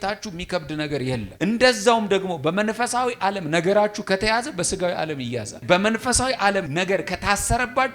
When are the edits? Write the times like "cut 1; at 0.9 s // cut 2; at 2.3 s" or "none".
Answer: cut 1; at 5.6 s // cut 2; at 6.7 s